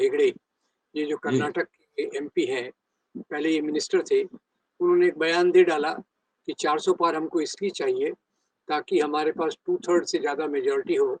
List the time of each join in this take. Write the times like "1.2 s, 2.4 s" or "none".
none